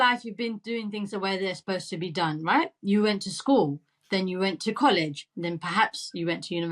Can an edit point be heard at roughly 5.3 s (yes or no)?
no